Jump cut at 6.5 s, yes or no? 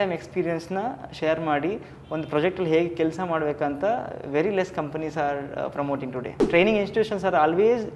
no